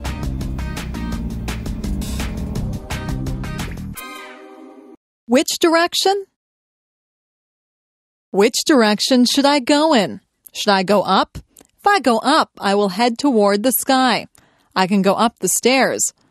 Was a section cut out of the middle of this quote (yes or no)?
yes